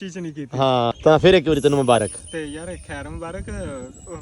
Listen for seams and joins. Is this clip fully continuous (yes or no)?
no